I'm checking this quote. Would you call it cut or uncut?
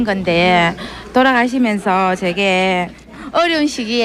uncut